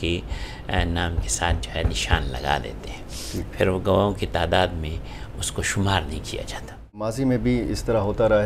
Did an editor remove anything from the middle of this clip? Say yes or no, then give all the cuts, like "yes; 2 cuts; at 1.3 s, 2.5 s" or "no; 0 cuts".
yes; 1 cut; at 7.1 s